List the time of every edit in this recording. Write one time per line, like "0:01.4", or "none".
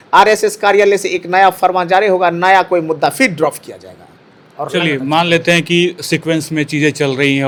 none